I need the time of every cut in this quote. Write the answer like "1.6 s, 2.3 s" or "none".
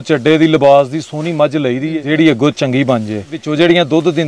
2.0 s, 3.4 s